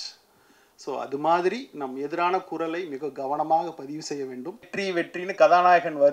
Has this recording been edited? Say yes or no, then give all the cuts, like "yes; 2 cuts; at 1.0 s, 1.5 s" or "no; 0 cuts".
yes; 1 cut; at 4.7 s